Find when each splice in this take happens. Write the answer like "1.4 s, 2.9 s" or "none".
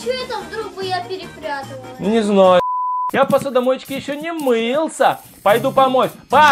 2.6 s